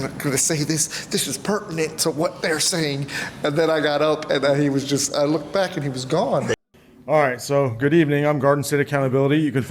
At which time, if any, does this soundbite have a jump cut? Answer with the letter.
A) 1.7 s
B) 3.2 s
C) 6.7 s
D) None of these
C